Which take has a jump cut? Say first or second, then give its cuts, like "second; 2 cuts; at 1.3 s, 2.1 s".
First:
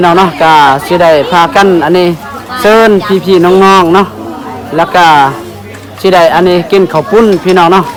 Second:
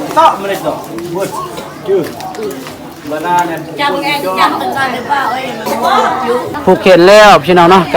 second; 1 cut; at 6.6 s